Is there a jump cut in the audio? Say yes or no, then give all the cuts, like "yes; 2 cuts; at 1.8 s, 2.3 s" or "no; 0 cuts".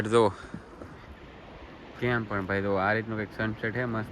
no; 0 cuts